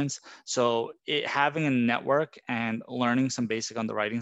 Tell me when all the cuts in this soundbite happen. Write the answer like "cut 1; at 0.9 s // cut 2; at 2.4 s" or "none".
cut 1; at 1.0 s